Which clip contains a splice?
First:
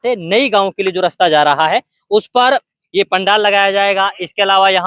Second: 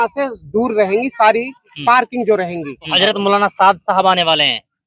second; 1 cut; at 2.9 s

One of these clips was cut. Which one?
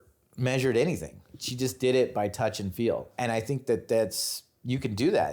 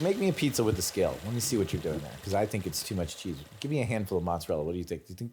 first; 2 cuts; at 1.4 s, 3.1 s

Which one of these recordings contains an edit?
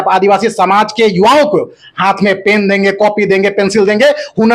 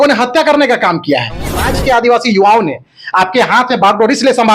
second; 1 cut; at 1.7 s

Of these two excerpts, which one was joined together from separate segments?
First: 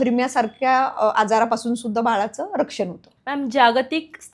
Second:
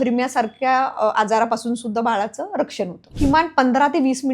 second; 1 cut; at 3.2 s

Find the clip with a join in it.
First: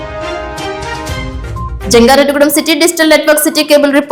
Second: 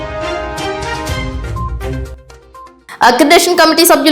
second; 1 cut; at 1.8 s

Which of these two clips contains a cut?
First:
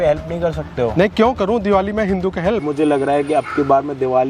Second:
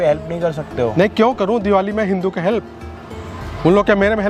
first; 1 cut; at 2.7 s

